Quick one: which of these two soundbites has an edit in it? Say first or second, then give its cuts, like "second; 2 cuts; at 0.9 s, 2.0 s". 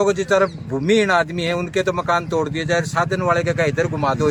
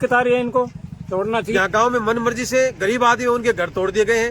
second; 1 cut; at 1.5 s